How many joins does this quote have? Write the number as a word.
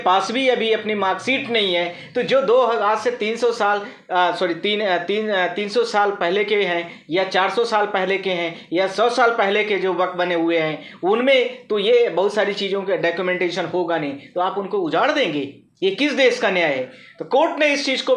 zero